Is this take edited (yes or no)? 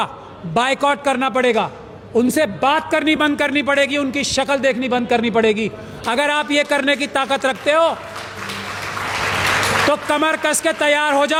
no